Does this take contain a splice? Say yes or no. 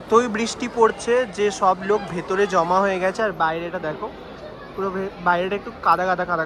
no